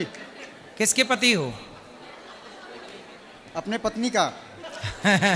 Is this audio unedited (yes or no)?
yes